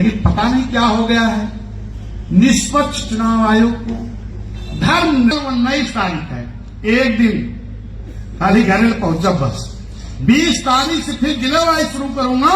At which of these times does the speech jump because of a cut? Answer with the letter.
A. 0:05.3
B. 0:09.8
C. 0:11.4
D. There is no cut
A